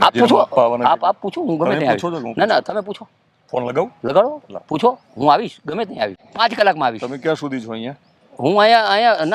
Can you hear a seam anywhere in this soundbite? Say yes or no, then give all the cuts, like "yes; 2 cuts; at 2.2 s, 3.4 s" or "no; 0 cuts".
yes; 1 cut; at 6.2 s